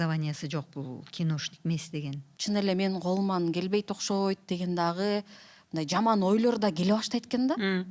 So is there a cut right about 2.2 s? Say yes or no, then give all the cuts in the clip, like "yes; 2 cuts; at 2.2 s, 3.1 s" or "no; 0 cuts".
yes; 1 cut; at 2.2 s